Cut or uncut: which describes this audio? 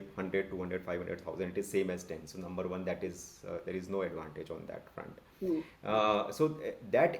uncut